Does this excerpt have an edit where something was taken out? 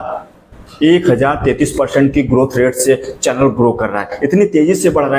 no; 0 cuts

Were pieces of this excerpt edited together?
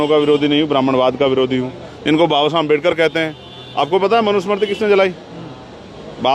no; 0 cuts

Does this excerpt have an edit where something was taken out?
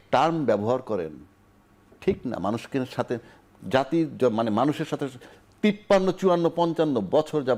no; 0 cuts

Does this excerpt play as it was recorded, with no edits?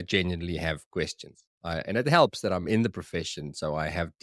yes; 0 cuts

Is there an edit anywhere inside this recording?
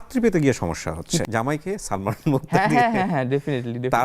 yes; 1 cut; at 1.2 s

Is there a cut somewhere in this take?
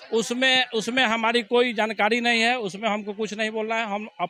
no; 0 cuts

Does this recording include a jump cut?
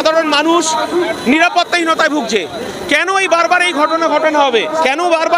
no; 0 cuts

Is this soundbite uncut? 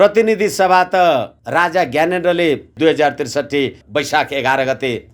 no; 3 cuts; at 1.4 s, 2.7 s, 3.8 s

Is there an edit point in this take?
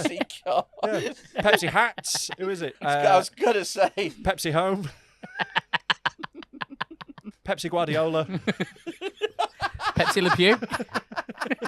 yes; 2 cuts; at 2.7 s, 7.3 s

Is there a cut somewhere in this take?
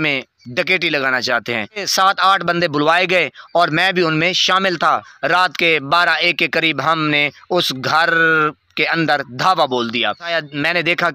yes; 3 cuts; at 1.9 s, 5.1 s, 10.3 s

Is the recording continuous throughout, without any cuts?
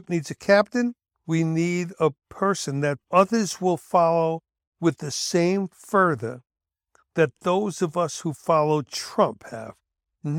no; 1 cut; at 1.1 s

